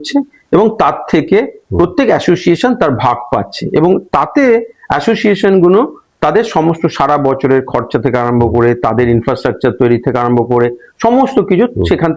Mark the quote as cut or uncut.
uncut